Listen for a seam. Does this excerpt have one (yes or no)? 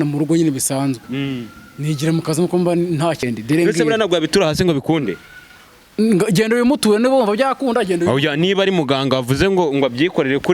yes